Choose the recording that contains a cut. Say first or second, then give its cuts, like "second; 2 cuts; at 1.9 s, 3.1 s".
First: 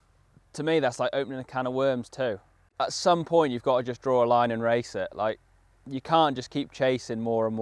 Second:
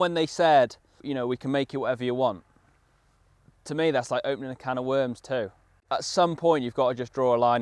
second; 1 cut; at 1.0 s